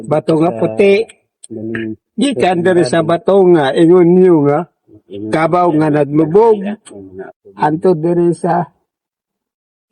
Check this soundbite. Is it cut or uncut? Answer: uncut